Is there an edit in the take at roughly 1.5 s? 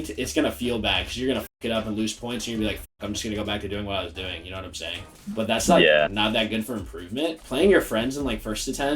no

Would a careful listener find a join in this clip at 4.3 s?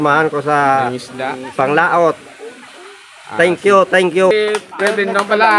yes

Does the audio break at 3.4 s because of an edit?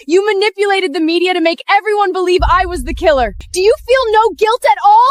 yes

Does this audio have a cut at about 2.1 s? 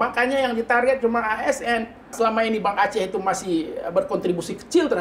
yes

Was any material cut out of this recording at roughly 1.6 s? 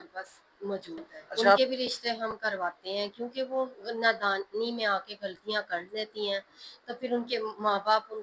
yes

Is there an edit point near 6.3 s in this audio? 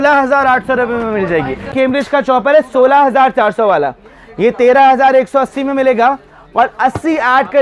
no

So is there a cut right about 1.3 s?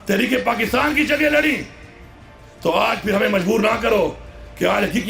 no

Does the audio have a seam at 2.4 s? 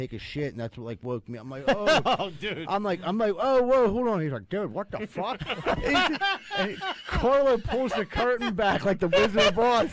no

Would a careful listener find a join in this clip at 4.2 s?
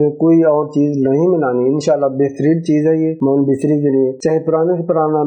yes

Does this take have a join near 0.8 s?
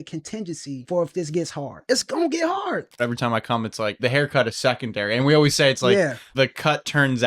yes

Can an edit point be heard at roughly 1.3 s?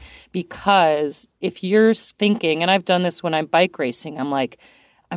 yes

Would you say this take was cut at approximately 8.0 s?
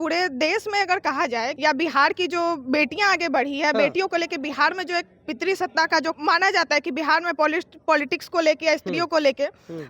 no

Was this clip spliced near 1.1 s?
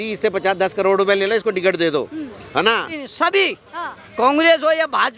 no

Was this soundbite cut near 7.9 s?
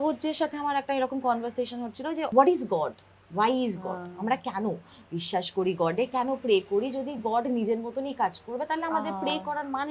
no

